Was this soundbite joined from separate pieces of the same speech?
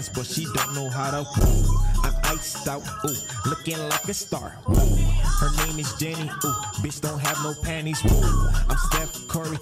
no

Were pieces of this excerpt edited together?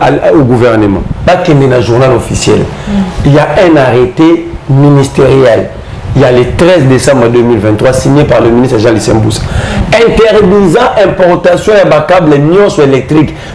yes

